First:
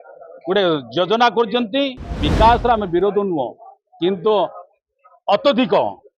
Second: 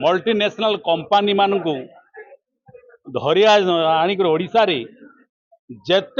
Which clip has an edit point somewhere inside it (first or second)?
first